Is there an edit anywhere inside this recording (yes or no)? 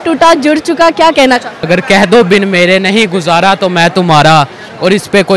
yes